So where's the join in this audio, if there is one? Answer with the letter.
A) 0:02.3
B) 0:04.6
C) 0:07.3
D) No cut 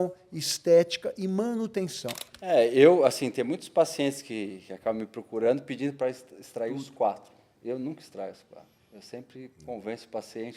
A